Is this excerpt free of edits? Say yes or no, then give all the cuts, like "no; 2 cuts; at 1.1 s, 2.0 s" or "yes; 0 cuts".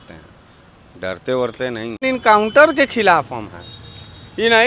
no; 1 cut; at 2.0 s